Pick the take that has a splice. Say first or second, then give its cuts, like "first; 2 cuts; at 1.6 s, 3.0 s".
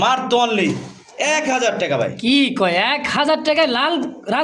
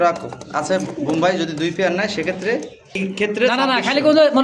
second; 1 cut; at 3.0 s